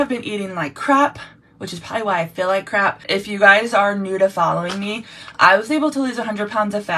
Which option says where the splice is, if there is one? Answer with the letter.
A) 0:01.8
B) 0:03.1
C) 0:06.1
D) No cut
B